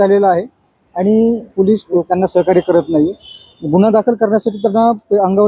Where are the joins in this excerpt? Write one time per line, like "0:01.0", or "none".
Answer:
0:01.8